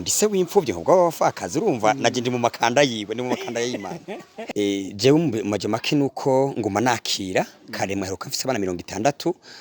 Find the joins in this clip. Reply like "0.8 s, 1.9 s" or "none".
4.5 s